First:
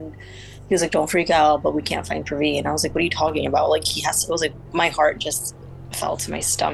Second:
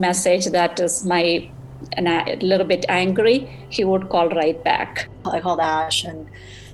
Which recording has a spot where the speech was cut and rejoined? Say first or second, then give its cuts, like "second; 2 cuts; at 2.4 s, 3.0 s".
second; 1 cut; at 5.1 s